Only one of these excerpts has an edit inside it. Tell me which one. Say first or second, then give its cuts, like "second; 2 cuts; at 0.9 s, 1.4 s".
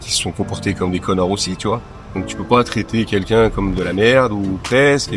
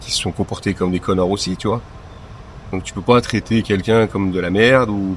first; 1 cut; at 2.0 s